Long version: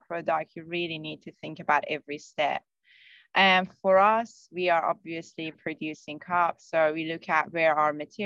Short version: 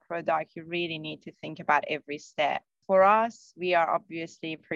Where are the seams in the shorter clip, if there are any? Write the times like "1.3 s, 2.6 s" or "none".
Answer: 2.8 s